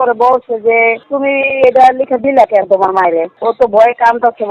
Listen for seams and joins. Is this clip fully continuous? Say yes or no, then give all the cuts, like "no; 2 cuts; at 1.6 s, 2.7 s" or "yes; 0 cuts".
no; 2 cuts; at 1.0 s, 3.4 s